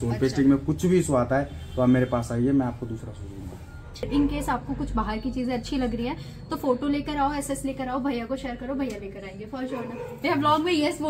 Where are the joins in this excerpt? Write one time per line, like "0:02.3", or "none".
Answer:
0:04.1